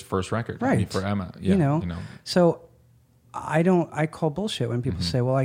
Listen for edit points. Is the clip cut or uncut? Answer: uncut